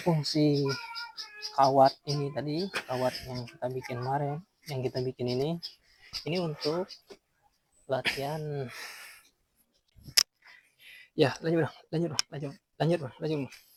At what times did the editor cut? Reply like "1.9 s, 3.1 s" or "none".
none